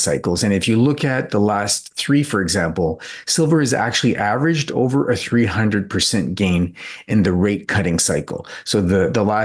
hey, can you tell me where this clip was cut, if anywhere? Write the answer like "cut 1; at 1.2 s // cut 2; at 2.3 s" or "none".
none